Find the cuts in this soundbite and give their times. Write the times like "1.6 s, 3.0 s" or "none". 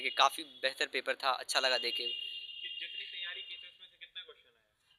none

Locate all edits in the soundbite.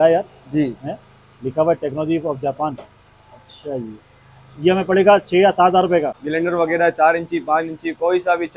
6.2 s

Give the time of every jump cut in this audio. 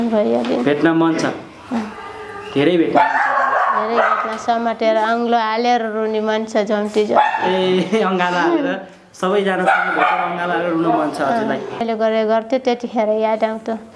11.8 s

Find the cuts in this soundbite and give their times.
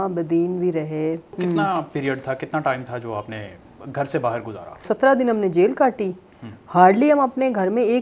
1.4 s, 4.8 s

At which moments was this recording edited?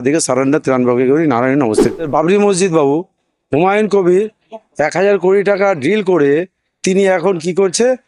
2.0 s

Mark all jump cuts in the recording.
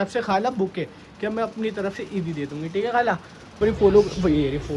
3.6 s

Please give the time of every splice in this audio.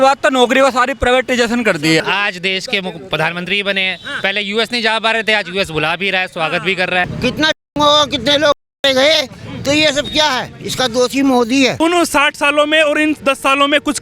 2.0 s, 7.1 s, 11.8 s

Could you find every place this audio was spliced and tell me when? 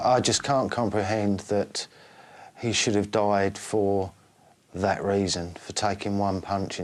none

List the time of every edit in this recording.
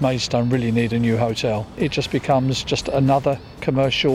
1.7 s

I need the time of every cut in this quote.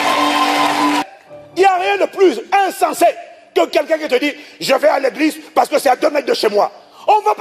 1.1 s

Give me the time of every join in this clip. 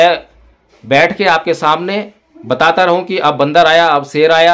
none

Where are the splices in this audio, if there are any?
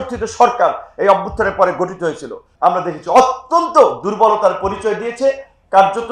2.5 s

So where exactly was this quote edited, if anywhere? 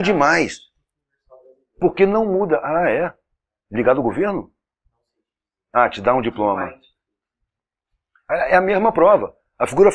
8.0 s

